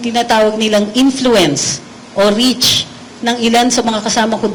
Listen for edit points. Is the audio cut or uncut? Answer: uncut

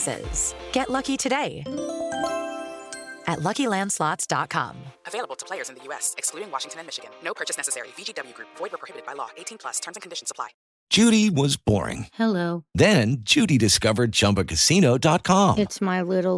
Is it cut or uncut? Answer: cut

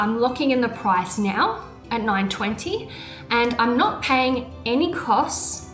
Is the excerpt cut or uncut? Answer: uncut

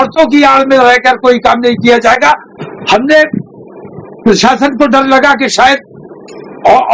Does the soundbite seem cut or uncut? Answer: uncut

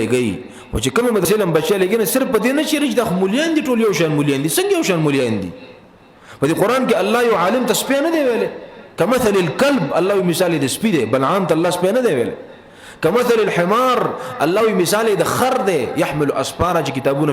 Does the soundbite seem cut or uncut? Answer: cut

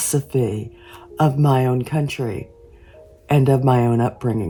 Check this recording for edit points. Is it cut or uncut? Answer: uncut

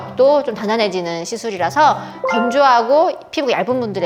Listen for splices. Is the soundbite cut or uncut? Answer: uncut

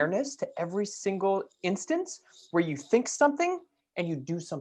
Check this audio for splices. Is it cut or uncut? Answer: uncut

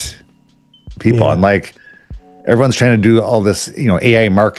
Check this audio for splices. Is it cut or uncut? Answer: uncut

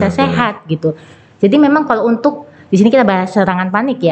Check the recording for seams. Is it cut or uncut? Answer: uncut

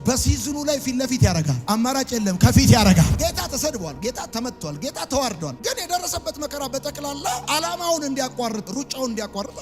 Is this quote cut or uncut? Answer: cut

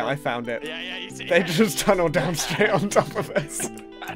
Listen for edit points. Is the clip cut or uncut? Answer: uncut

